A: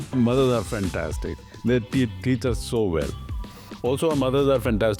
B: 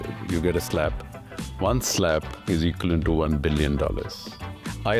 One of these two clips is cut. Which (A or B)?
B